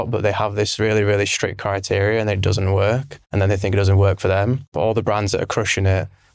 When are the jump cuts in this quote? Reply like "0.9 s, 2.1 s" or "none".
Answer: 3.2 s, 4.6 s